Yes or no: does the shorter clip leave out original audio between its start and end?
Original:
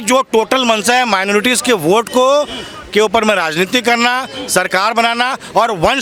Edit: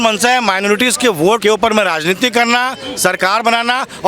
yes